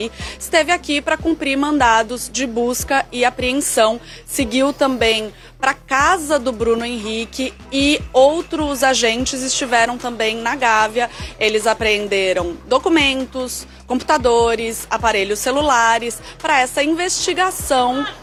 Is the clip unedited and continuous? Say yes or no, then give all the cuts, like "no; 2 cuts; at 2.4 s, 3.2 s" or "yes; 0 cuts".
yes; 0 cuts